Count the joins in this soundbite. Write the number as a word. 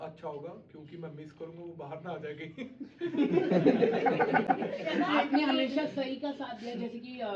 zero